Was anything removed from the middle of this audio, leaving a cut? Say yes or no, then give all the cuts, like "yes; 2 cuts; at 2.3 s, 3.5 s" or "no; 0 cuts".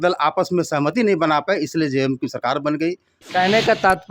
yes; 1 cut; at 3.1 s